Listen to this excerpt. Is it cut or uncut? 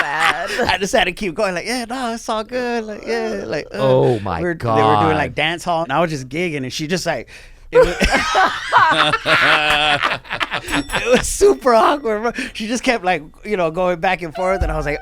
cut